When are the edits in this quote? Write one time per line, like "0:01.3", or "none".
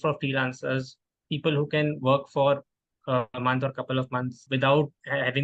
0:04.4